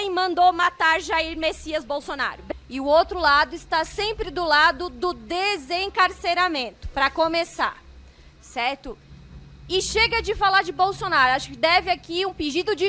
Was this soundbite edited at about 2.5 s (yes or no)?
yes